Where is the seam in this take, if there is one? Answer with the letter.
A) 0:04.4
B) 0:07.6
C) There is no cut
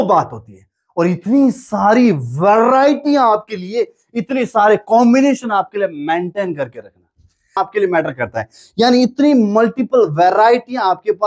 B